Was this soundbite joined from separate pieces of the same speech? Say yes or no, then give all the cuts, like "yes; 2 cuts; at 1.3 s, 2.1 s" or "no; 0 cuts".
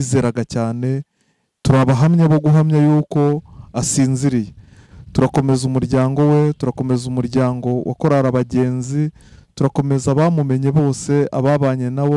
no; 0 cuts